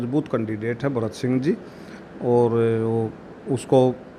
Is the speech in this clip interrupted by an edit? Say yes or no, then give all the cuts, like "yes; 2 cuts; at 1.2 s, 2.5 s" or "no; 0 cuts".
no; 0 cuts